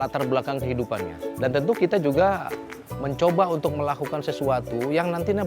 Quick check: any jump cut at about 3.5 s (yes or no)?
no